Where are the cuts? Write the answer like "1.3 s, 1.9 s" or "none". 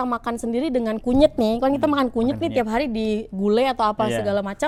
none